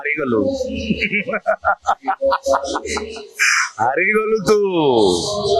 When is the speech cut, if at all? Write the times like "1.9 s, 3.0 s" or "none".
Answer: none